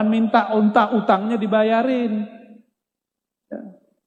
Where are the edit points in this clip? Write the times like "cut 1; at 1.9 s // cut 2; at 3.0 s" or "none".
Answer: none